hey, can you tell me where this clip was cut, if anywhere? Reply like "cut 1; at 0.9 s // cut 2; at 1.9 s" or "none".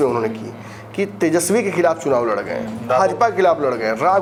none